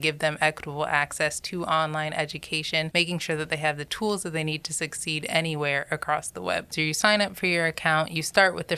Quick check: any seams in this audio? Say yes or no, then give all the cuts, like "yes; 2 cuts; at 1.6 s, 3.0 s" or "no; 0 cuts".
yes; 3 cuts; at 2.9 s, 3.9 s, 6.7 s